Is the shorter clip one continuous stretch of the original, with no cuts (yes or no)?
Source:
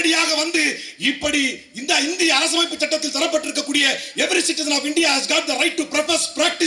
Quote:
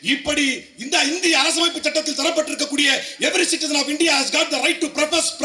yes